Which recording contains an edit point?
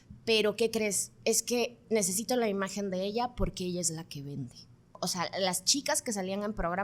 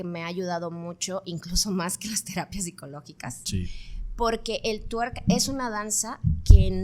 first; 1 cut; at 4.9 s

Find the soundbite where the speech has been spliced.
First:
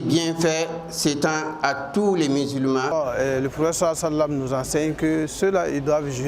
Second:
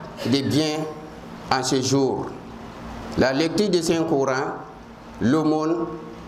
first; 1 cut; at 2.9 s

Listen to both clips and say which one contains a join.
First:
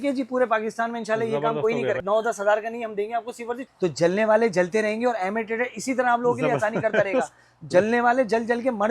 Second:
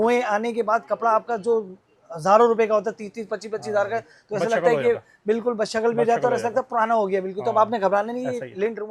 first; 2 cuts; at 2.0 s, 3.6 s

